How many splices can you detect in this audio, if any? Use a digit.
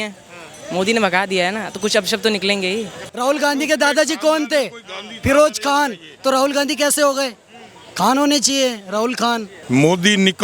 2